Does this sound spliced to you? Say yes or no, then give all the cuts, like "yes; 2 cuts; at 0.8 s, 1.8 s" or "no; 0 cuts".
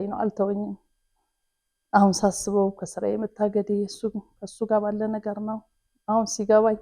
no; 0 cuts